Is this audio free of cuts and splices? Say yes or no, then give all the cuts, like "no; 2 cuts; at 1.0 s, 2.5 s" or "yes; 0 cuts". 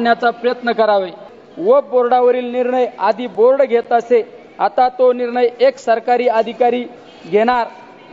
no; 1 cut; at 1.3 s